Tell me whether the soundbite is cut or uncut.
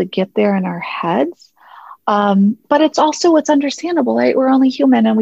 uncut